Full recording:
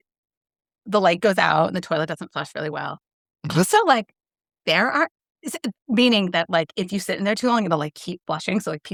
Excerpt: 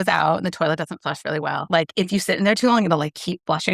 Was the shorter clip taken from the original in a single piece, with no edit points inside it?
no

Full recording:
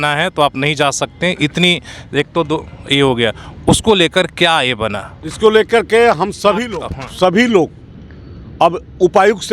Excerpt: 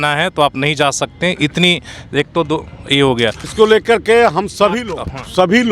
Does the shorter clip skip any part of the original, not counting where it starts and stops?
yes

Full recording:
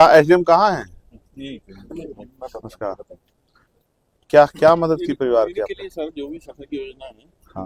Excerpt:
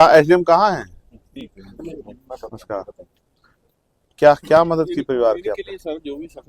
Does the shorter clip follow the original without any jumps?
no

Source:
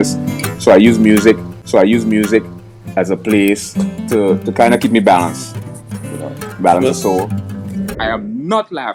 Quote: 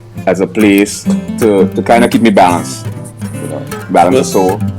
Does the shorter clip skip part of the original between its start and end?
no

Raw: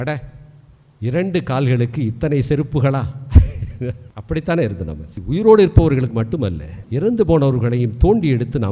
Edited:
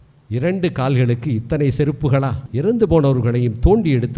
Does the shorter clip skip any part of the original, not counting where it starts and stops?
yes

